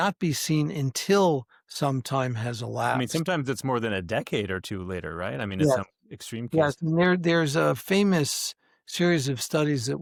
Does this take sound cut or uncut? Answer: uncut